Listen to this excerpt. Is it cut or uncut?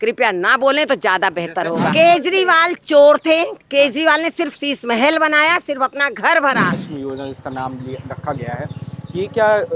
cut